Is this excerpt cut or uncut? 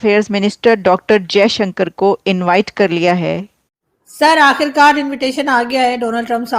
cut